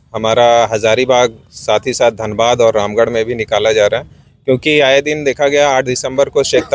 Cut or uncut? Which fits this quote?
uncut